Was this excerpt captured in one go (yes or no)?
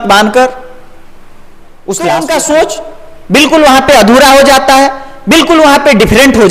no